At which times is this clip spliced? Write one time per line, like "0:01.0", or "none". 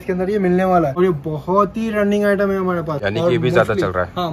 0:00.9
0:03.0

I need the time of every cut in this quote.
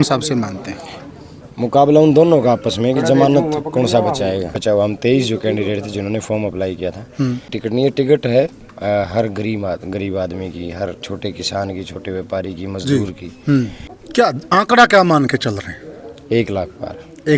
0:04.6
0:07.6
0:13.8

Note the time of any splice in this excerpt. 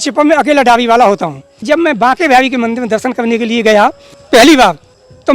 0:01.6
0:04.1

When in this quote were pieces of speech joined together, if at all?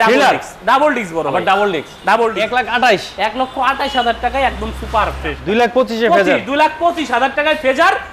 0:02.4
0:05.4

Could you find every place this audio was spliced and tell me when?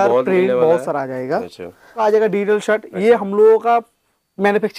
0:02.0

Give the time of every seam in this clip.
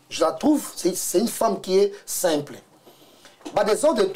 none

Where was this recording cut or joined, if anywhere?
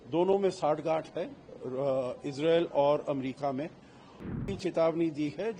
0:04.3

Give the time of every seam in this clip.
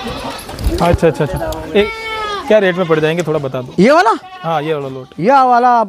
0:01.8

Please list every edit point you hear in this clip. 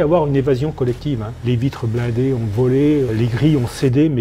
0:01.4
0:03.1

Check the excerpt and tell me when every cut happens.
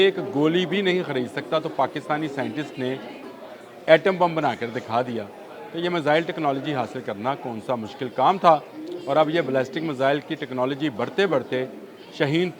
none

